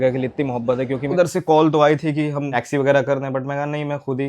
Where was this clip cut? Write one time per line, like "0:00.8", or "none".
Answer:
0:01.1